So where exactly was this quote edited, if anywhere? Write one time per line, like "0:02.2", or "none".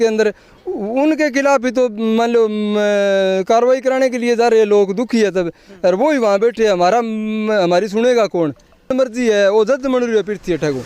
0:08.9